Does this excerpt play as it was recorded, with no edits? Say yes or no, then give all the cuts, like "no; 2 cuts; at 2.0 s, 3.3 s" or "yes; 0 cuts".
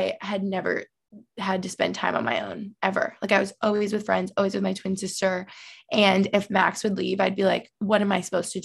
yes; 0 cuts